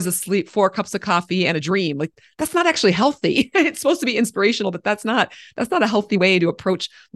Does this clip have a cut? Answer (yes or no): no